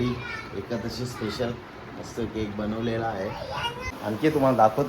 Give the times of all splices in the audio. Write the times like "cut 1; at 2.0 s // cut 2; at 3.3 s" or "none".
cut 1; at 4.0 s